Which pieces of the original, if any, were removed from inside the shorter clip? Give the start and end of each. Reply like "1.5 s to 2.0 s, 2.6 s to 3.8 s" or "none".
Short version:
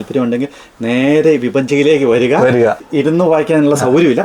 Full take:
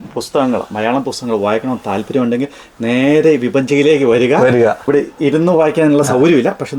4.8 s to 5.1 s